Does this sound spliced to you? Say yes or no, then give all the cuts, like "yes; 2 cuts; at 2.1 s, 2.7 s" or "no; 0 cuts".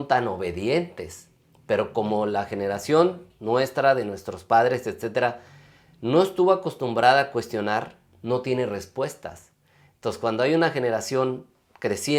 no; 0 cuts